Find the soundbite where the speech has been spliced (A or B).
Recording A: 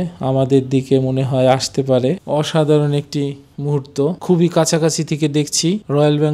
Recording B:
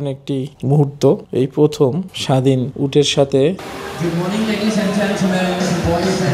B